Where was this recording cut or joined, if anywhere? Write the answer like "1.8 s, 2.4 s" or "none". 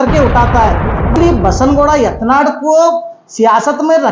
1.2 s